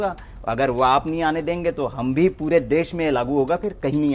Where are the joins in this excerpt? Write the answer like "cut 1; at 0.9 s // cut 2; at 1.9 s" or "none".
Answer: none